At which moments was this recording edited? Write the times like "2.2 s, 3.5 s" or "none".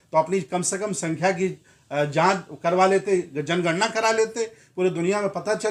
none

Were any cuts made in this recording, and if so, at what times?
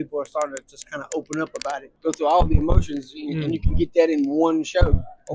1.9 s

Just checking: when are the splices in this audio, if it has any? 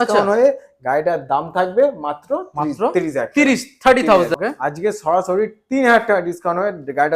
4.4 s

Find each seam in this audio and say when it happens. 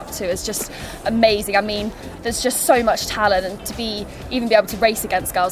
none

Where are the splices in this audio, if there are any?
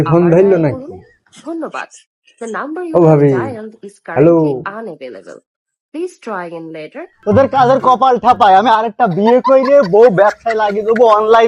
7.1 s

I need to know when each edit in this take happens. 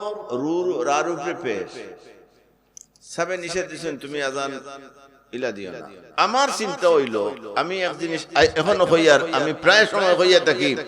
none

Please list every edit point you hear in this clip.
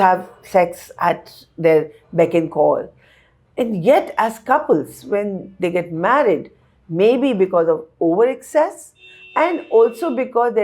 none

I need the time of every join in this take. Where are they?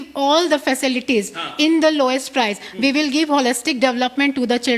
none

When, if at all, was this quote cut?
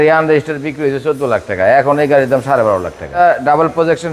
3.2 s

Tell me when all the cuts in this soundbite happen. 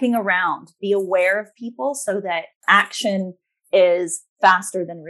none

